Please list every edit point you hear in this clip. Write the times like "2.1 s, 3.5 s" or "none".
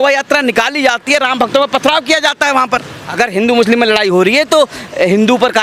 3.0 s